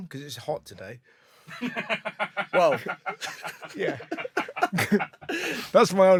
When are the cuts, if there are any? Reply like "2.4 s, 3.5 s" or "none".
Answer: none